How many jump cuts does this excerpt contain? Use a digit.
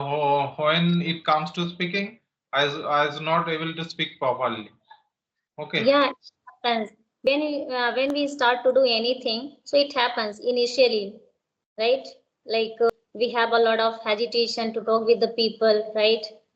1